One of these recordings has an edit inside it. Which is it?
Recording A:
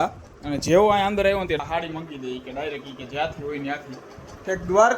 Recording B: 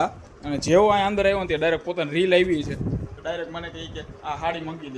A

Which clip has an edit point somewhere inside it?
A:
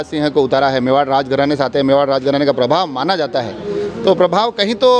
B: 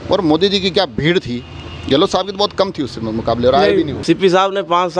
B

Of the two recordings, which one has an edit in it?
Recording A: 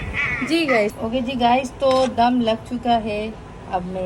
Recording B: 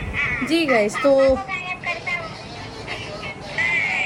A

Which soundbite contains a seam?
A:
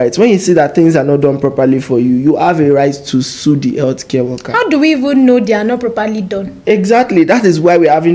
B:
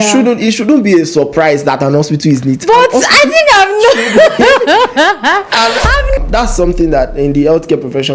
B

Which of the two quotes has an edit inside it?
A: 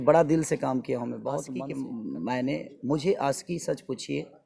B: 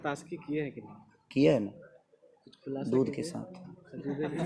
A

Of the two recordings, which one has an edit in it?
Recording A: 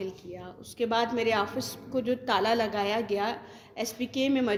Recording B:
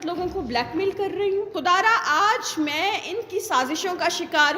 B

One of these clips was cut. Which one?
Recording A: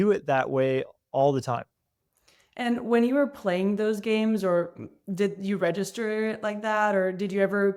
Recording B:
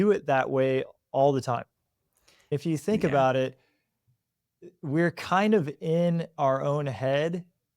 B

